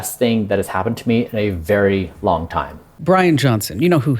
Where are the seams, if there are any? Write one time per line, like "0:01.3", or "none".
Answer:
0:02.9